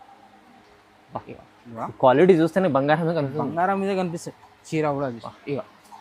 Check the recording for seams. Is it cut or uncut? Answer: cut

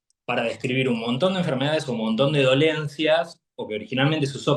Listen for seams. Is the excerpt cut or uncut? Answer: uncut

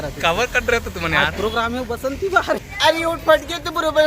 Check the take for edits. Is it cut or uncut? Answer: cut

